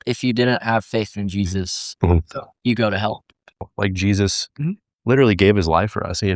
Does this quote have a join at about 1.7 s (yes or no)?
no